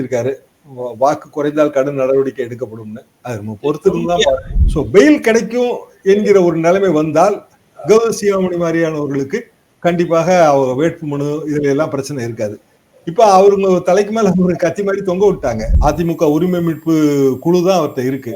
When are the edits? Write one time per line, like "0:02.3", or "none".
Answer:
0:04.5
0:15.7